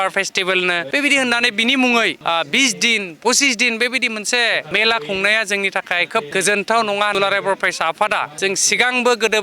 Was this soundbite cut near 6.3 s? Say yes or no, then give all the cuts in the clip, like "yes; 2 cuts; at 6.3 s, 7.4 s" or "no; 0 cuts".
yes; 6 cuts; at 0.8 s, 2.2 s, 4.7 s, 6.3 s, 7.1 s, 8.3 s